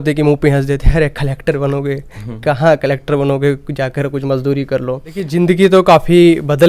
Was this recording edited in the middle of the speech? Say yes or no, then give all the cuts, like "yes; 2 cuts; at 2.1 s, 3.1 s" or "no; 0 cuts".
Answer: yes; 1 cut; at 5.3 s